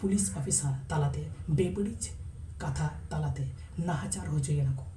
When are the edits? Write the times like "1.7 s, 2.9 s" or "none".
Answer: none